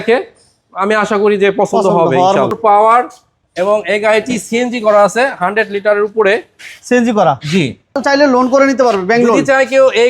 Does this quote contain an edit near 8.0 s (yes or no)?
yes